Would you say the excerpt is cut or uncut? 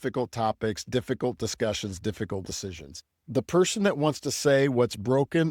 cut